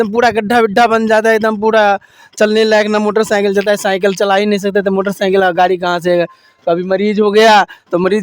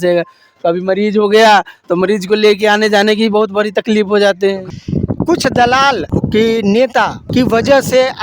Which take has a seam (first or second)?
second